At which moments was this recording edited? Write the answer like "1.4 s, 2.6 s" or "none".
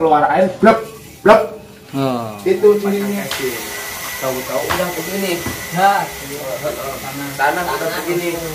3.1 s